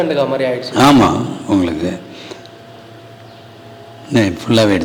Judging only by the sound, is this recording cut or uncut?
uncut